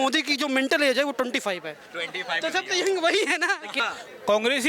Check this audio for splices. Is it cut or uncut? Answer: cut